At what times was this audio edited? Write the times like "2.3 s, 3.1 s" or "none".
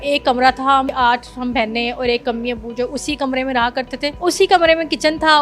0.9 s, 4.1 s